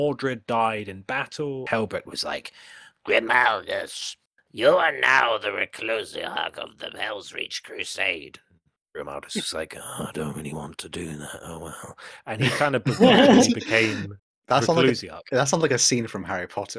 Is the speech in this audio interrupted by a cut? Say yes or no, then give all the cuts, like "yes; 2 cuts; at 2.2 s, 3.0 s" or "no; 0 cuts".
yes; 1 cut; at 1.6 s